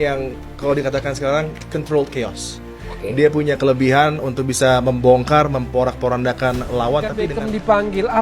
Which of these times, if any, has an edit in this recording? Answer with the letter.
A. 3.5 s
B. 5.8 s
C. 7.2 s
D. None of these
C